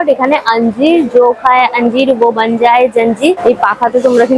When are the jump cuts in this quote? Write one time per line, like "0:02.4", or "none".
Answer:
0:03.4